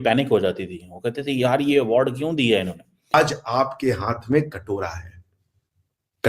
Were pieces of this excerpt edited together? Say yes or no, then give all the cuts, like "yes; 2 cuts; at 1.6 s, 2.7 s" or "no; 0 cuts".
yes; 1 cut; at 3.1 s